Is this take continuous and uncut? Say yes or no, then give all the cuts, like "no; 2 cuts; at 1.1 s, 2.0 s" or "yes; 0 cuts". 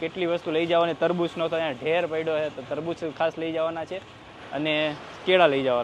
yes; 0 cuts